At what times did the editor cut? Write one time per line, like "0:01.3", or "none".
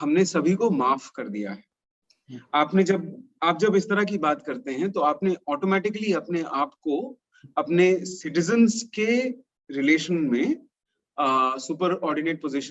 none

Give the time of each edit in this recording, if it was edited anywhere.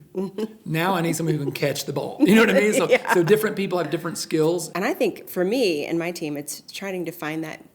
0:04.7

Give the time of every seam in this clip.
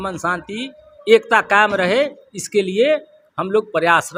none

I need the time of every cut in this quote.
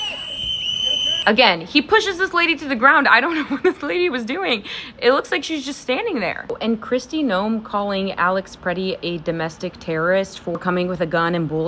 0:01.2
0:06.5

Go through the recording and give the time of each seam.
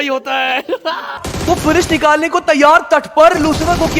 0:01.3

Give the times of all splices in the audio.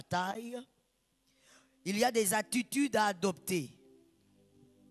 0:03.8

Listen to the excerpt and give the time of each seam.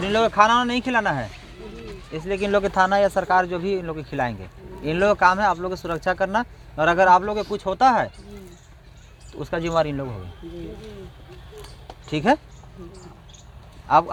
none

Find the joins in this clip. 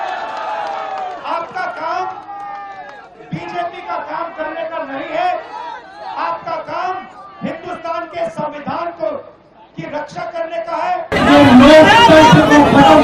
0:11.1

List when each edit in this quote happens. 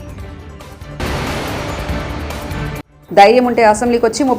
0:01.0
0:02.9

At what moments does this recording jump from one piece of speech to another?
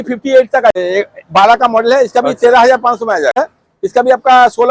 0:00.7
0:03.4

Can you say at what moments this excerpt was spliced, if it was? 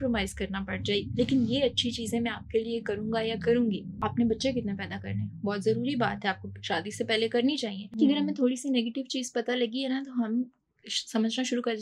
0:03.9
0:07.8

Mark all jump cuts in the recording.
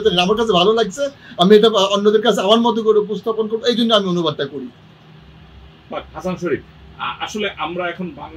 none

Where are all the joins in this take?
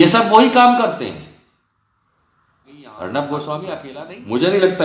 0:03.8

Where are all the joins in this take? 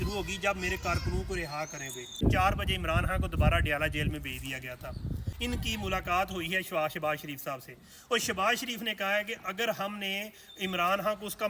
0:02.2
0:05.3

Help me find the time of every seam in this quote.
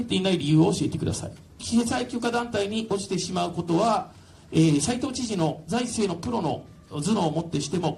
0:01.6

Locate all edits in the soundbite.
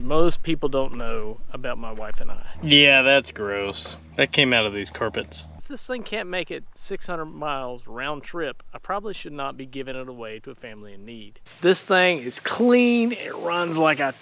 0:02.5
0:05.4
0:11.5

